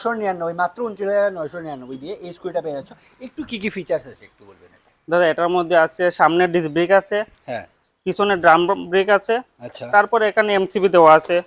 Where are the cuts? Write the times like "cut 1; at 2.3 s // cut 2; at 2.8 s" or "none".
none

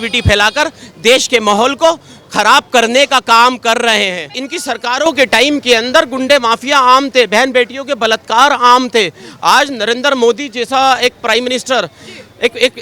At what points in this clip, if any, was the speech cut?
cut 1; at 4.4 s

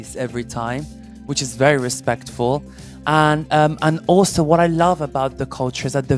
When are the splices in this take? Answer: none

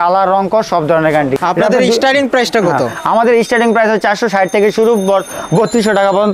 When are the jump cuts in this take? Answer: none

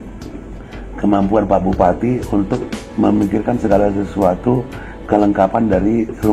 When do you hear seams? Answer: none

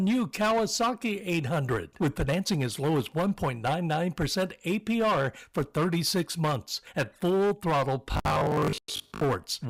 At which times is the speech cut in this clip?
none

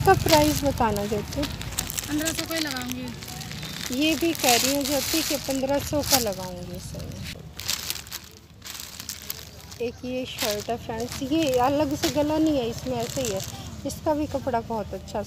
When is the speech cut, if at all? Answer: cut 1; at 7.4 s

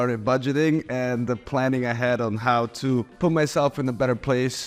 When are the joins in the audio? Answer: none

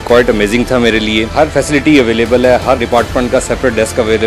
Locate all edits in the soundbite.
cut 1; at 1.4 s // cut 2; at 2.8 s

